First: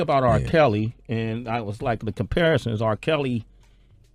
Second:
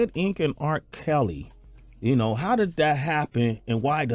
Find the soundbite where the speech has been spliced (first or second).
first